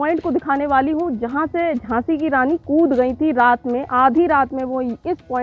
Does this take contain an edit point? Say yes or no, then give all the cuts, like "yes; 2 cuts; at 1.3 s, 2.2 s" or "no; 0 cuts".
no; 0 cuts